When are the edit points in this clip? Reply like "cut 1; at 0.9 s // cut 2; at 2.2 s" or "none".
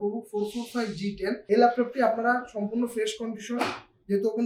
cut 1; at 1.4 s